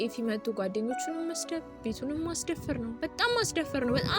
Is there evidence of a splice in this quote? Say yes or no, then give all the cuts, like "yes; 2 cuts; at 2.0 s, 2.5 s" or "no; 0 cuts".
no; 0 cuts